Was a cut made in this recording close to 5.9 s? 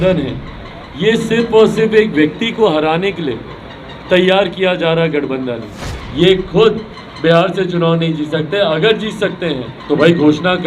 yes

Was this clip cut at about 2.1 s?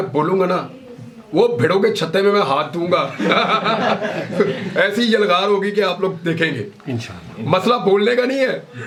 no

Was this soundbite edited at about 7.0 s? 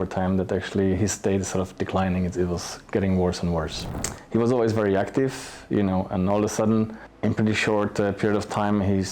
yes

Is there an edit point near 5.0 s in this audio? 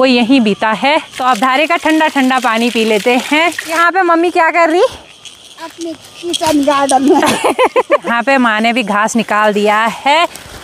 no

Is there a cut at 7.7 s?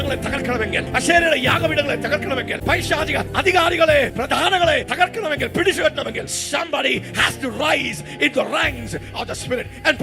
no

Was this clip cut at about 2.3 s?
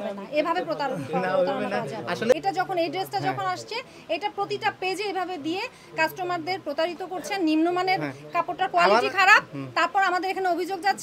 yes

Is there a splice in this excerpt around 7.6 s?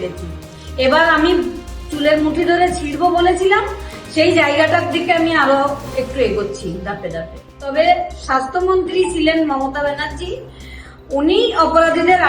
yes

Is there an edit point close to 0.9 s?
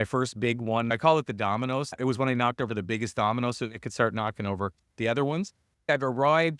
yes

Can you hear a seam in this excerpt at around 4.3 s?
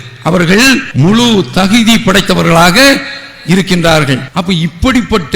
yes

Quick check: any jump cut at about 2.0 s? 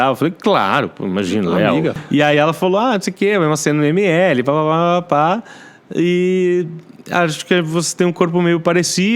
yes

